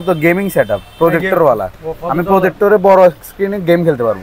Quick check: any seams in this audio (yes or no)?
no